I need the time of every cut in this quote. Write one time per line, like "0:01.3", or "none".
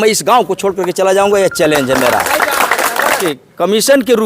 0:03.2